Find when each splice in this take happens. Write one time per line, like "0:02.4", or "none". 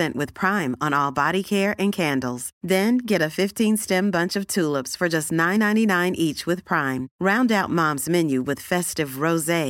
none